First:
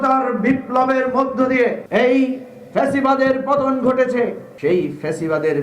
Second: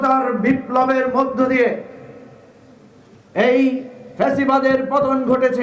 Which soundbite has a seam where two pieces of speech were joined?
first; 2 cuts; at 1.8 s, 4.5 s

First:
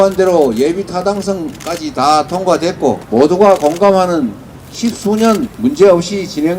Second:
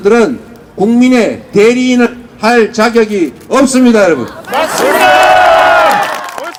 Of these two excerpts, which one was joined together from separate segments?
first; 2 cuts; at 3.0 s, 5.5 s

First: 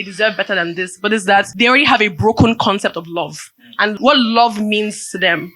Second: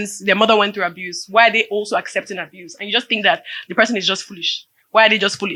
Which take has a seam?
first; 2 cuts; at 1.5 s, 4.0 s

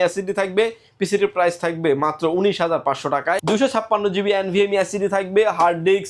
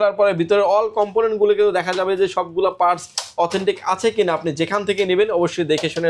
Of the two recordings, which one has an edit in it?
first; 1 cut; at 3.4 s

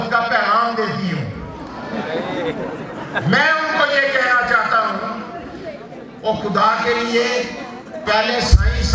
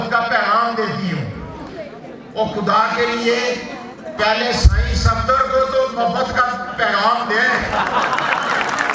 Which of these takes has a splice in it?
second; 1 cut; at 1.7 s

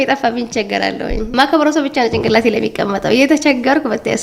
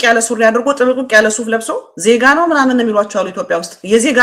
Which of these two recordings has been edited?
second; 1 cut; at 1.8 s

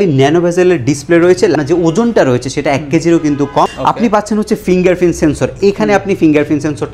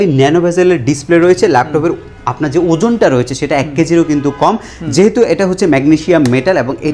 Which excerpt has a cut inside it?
first; 2 cuts; at 1.5 s, 3.7 s

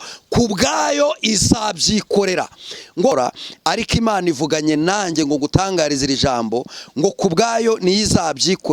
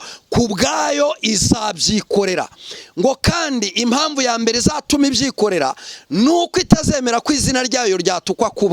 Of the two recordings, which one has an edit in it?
first; 1 cut; at 3.1 s

